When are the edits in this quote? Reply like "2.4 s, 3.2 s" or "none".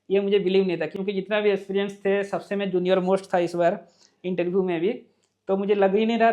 none

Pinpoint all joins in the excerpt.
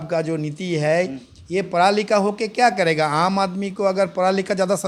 none

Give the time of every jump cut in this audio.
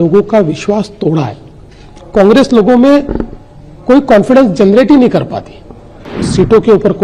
6.1 s

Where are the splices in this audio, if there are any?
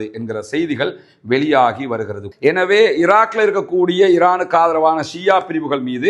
2.3 s

